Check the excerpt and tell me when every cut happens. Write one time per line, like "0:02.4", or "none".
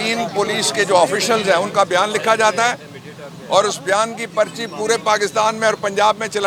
none